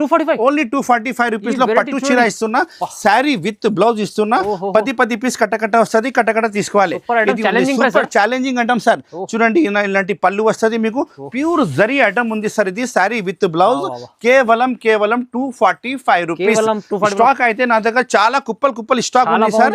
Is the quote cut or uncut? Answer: uncut